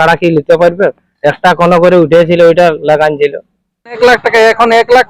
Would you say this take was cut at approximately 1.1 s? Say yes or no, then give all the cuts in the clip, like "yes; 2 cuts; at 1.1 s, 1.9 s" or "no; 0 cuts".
no; 1 cut; at 4.0 s